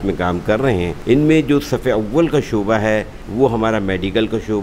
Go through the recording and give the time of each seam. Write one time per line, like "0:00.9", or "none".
0:00.9
0:03.2